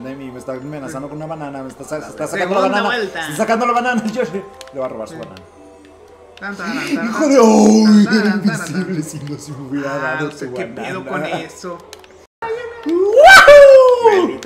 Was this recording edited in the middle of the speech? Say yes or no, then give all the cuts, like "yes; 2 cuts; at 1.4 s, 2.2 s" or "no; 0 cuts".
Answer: no; 0 cuts